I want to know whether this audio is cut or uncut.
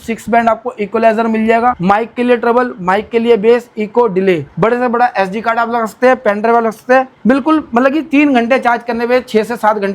cut